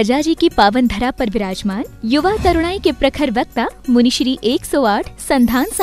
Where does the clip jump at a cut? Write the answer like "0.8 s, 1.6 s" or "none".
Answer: none